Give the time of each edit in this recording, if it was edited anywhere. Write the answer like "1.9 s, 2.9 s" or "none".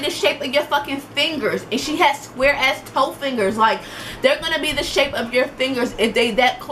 none